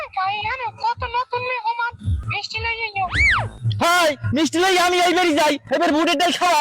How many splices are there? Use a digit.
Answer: 1